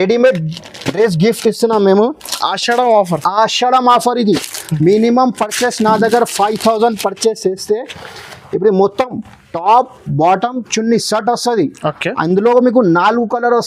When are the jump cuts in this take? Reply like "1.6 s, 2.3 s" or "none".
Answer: none